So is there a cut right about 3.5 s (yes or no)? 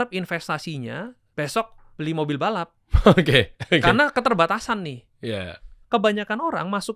no